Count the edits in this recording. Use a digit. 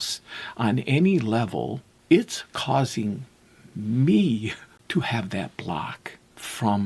2